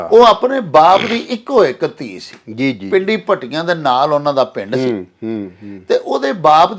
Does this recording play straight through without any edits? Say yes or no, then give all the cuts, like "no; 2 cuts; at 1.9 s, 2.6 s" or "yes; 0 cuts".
yes; 0 cuts